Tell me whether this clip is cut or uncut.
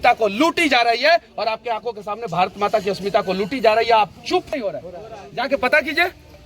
cut